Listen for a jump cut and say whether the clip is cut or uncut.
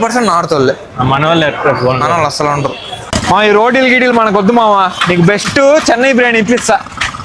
uncut